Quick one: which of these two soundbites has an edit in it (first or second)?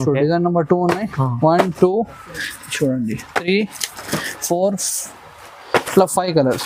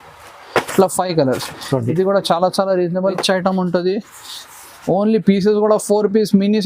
second